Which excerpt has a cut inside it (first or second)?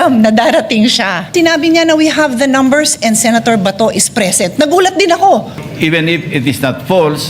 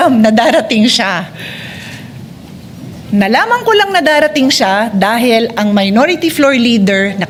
first